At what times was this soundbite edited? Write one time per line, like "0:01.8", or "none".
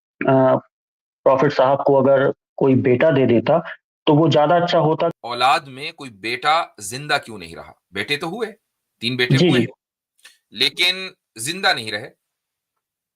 0:05.1

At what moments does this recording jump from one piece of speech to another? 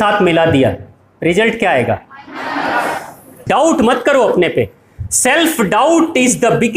0:03.4

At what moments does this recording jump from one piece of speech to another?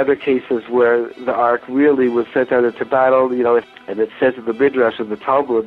0:03.7

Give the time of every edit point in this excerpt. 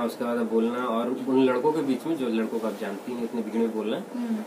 none

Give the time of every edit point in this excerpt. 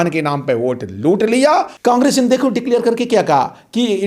0:01.7

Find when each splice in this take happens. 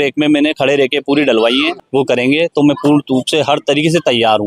0:01.7

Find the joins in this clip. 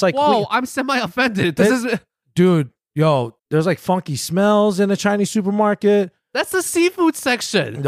0:03.3

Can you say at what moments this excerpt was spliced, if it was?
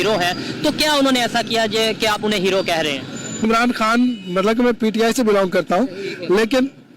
0:03.4

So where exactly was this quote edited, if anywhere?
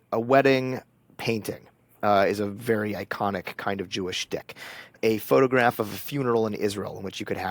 none

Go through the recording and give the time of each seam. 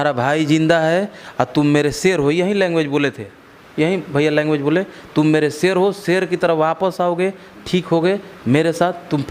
none

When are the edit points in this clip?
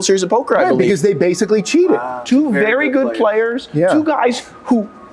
0:02.2

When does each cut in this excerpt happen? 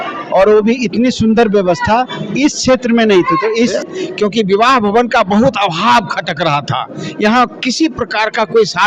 0:03.6

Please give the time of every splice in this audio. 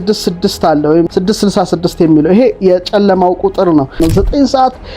0:01.1
0:04.0

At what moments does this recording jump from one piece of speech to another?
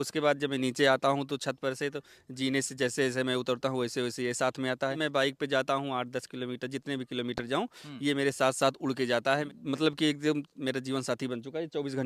0:05.0
0:09.5

